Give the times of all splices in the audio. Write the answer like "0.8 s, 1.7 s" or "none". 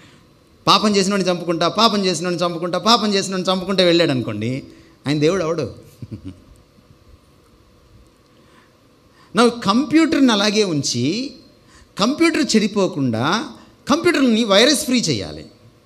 none